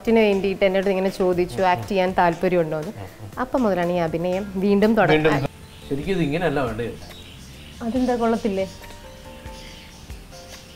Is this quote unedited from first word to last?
no; 1 cut; at 5.4 s

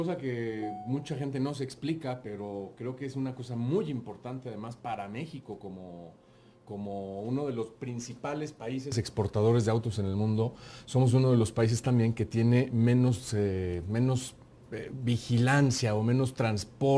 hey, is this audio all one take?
no; 1 cut; at 6.9 s

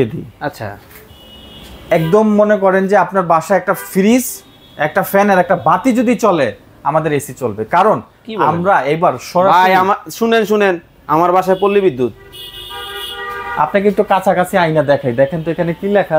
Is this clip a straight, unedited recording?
yes; 0 cuts

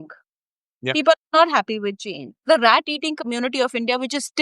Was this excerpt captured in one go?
no; 1 cut; at 2.3 s

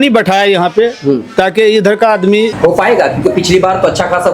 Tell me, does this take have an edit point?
yes; 1 cut; at 2.5 s

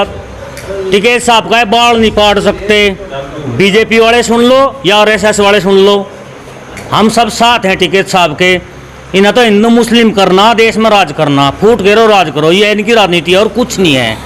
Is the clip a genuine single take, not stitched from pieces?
yes; 0 cuts

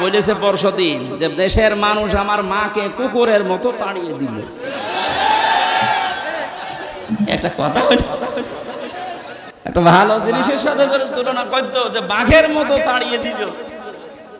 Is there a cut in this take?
yes; 1 cut; at 9.4 s

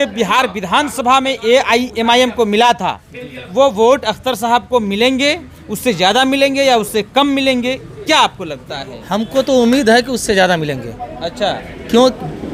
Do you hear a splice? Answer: no; 0 cuts

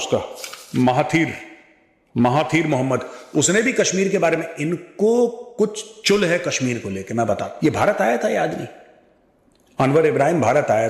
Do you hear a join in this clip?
yes; 1 cut; at 7.5 s

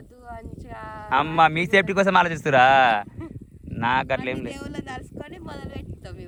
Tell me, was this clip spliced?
no; 0 cuts

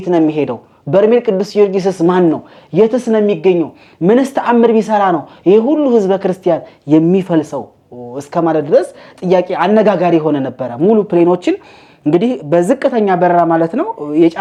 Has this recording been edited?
no; 0 cuts

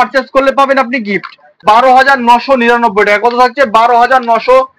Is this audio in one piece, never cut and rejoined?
no; 1 cut; at 1.6 s

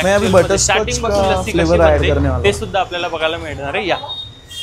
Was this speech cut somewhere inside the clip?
no; 0 cuts

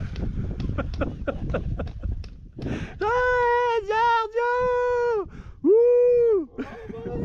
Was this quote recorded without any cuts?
yes; 0 cuts

